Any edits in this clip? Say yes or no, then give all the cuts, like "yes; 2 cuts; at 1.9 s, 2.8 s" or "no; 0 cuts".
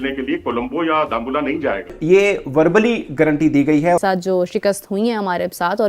yes; 2 cuts; at 1.9 s, 4.0 s